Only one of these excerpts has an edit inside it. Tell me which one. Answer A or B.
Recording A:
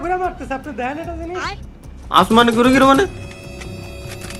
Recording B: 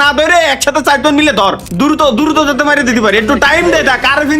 B